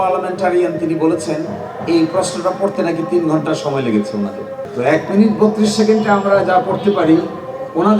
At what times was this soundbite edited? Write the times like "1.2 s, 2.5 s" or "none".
4.6 s